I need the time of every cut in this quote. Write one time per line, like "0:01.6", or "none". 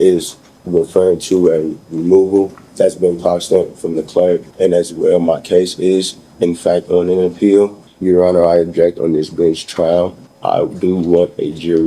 0:02.6
0:04.5
0:07.9
0:10.3